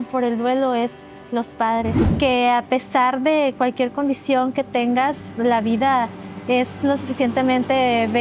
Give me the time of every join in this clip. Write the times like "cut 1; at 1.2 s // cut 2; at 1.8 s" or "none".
cut 1; at 2.0 s

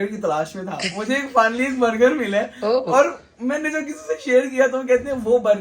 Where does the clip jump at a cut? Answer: none

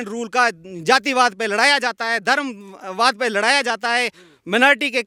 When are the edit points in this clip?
none

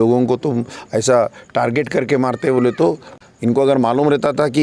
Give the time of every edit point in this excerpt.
cut 1; at 3.1 s

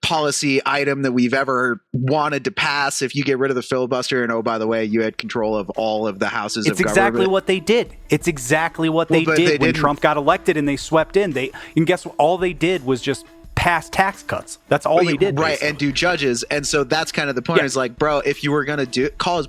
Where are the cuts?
none

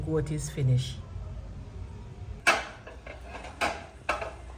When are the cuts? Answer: cut 1; at 2.4 s

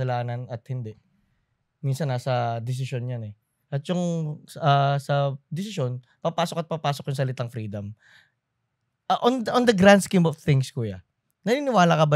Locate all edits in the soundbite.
none

